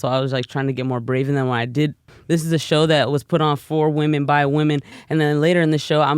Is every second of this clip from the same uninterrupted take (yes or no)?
no